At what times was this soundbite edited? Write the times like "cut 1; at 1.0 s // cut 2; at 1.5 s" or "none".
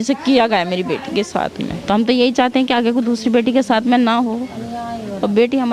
cut 1; at 1.7 s

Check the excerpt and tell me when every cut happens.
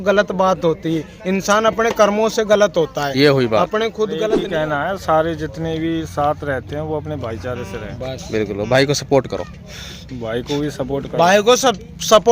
cut 1; at 4.4 s

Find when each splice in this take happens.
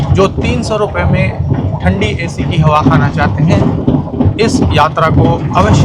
none

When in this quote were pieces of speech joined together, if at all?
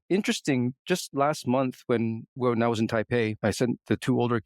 cut 1; at 3.3 s

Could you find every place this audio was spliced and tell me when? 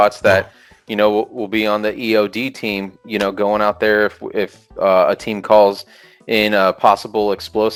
none

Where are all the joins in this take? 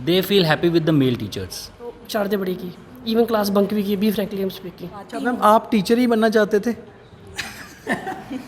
cut 1; at 2.0 s // cut 2; at 5.1 s

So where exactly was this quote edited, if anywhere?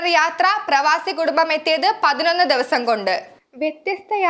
none

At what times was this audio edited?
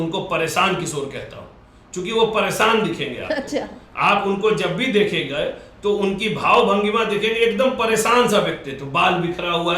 none

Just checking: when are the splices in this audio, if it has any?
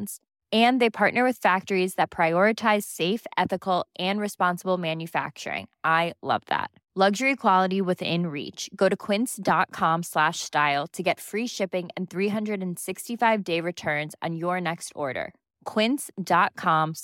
none

